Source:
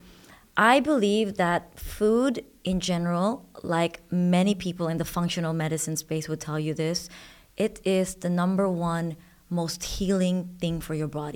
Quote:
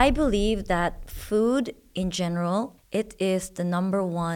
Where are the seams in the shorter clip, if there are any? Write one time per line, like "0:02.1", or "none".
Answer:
0:02.8